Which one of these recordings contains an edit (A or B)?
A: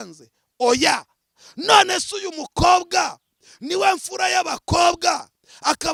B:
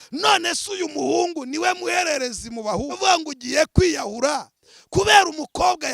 B